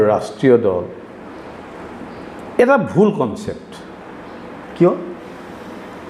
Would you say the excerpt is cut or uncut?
uncut